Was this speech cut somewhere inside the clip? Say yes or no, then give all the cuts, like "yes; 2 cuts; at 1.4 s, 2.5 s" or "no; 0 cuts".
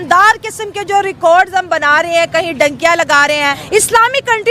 yes; 1 cut; at 3.6 s